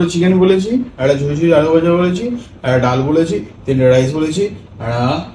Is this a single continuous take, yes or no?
yes